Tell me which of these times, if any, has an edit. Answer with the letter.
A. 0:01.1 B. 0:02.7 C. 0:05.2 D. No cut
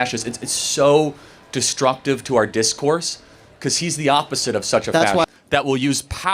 C